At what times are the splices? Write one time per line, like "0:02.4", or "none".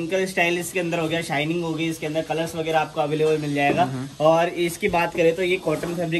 none